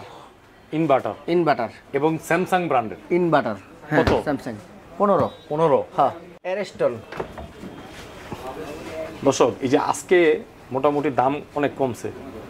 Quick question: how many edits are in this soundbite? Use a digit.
1